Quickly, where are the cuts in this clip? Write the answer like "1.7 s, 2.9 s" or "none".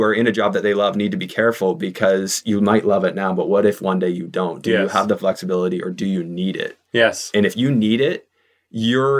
none